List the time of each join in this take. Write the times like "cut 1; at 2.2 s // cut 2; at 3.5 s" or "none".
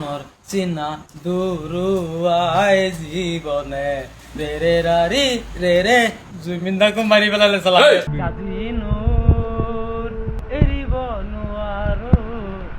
cut 1; at 8.1 s